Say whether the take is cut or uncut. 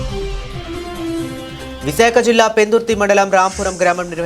cut